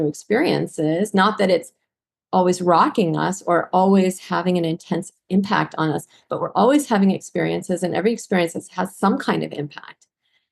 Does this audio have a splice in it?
no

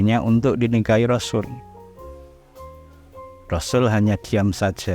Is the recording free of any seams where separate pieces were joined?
yes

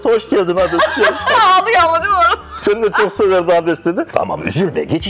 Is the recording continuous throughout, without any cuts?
no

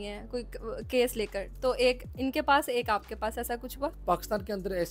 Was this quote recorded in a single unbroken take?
no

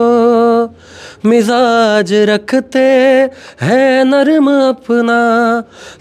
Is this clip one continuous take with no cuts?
yes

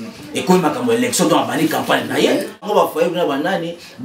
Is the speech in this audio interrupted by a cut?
yes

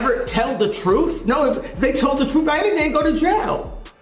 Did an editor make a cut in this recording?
no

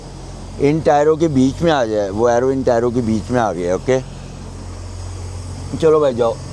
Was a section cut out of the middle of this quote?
no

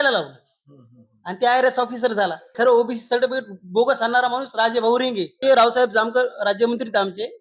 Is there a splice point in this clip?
yes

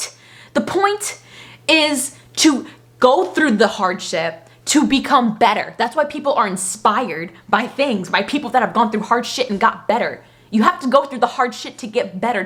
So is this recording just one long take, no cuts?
yes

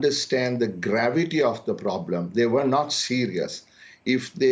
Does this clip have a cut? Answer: no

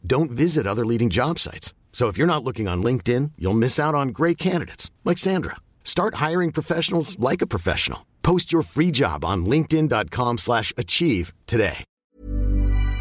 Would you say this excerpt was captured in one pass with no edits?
no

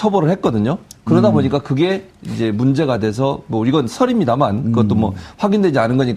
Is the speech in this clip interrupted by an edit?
no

